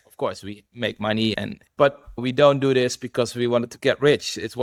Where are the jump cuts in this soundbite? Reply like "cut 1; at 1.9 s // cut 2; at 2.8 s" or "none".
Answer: none